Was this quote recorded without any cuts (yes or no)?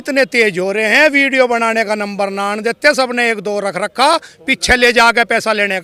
yes